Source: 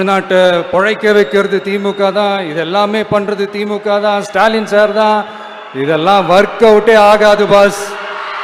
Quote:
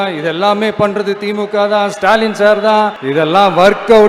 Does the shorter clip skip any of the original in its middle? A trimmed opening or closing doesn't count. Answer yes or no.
yes